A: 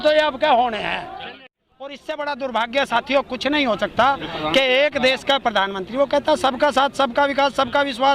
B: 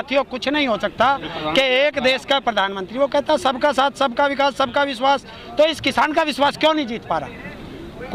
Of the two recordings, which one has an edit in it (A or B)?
A